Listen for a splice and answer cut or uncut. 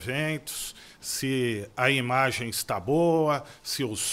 uncut